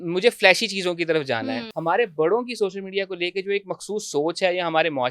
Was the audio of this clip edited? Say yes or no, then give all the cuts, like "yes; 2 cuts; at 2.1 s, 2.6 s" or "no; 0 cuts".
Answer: yes; 1 cut; at 1.7 s